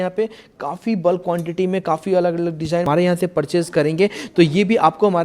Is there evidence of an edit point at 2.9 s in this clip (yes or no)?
yes